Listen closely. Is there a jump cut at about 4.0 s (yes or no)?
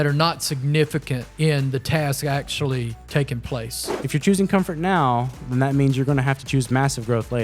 yes